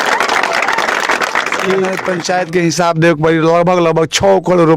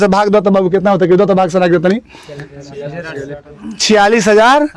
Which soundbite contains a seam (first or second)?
first